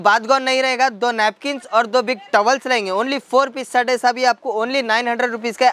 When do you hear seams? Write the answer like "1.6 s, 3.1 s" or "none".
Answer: none